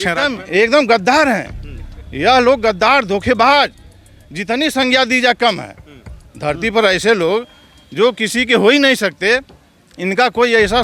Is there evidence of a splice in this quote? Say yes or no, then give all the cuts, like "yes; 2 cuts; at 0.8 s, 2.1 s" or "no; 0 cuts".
no; 0 cuts